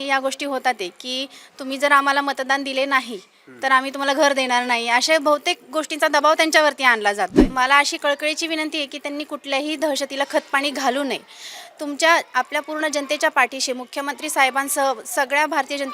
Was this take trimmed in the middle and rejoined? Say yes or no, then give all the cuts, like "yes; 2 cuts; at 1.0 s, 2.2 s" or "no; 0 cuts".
yes; 1 cut; at 7.4 s